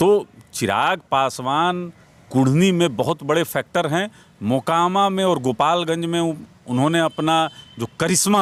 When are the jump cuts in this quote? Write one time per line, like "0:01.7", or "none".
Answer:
none